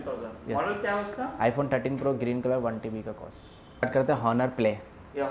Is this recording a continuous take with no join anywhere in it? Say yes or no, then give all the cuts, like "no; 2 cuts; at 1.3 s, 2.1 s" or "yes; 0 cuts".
no; 1 cut; at 3.8 s